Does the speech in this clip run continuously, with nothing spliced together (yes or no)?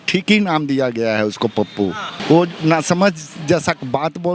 no